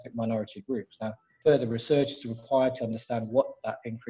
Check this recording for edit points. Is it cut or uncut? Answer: cut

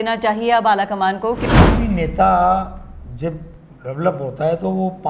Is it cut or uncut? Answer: cut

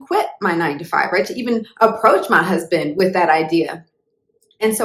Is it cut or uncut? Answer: uncut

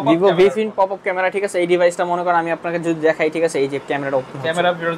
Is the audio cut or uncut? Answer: uncut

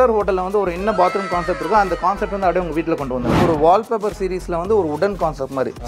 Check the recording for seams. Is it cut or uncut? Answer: cut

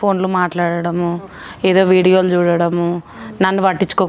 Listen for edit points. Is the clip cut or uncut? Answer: uncut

